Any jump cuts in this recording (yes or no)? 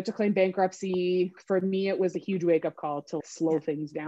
yes